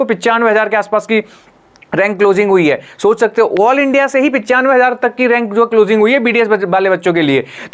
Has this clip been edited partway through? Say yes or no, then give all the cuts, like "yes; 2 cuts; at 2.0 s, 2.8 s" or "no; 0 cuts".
no; 0 cuts